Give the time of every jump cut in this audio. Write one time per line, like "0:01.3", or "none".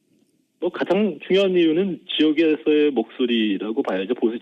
0:02.9